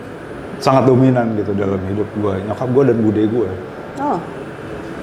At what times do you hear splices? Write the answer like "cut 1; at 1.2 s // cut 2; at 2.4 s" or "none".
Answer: none